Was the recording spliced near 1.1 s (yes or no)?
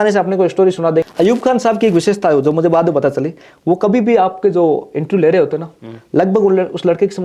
yes